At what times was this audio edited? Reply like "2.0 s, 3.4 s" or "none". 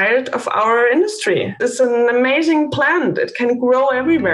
1.5 s